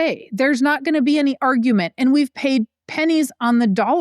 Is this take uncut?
no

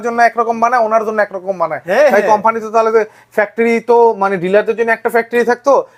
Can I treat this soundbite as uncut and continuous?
yes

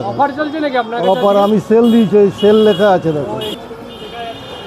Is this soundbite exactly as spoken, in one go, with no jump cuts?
no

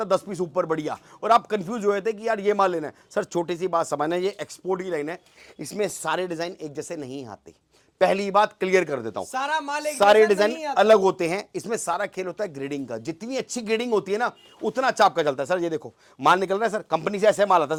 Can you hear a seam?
no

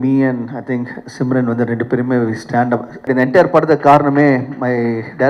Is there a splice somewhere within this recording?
yes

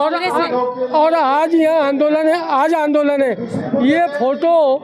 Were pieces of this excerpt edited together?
no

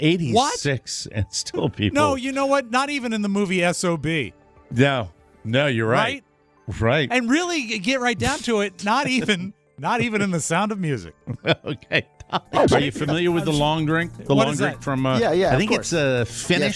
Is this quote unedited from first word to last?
no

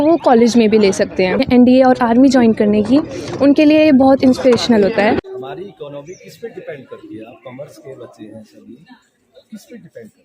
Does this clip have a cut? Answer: yes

